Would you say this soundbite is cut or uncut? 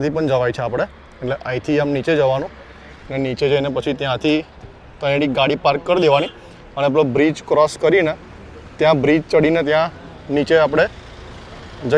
uncut